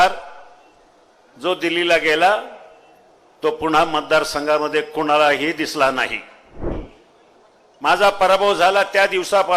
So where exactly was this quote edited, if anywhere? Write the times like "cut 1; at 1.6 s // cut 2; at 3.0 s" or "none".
cut 1; at 6.7 s